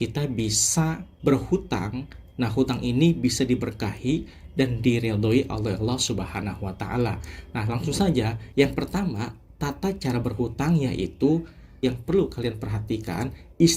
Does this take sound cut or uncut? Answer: cut